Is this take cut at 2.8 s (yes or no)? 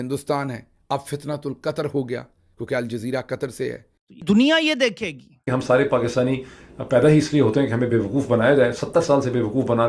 no